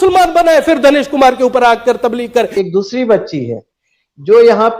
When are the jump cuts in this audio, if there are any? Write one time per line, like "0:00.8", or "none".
0:02.5